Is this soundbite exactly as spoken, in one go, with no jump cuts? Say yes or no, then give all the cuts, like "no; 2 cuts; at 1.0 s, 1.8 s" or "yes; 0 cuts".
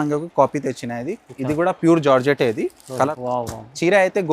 no; 1 cut; at 3.1 s